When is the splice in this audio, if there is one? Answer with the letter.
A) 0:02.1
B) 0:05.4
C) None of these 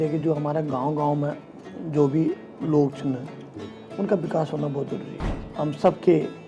B